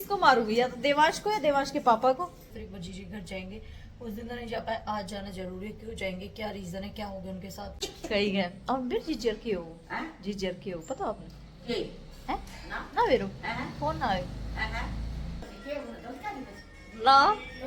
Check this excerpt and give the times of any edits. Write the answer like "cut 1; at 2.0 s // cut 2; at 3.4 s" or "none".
cut 1; at 2.5 s // cut 2; at 7.7 s // cut 3; at 15.5 s